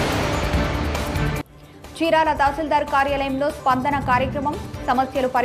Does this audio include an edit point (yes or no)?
yes